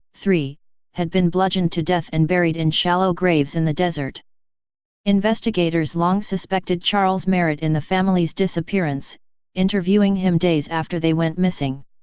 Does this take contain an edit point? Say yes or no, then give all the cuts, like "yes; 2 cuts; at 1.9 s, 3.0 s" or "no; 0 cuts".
yes; 1 cut; at 10.3 s